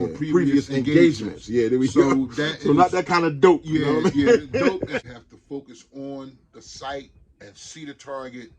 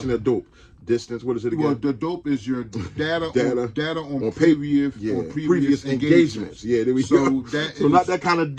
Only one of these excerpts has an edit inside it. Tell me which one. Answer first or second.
first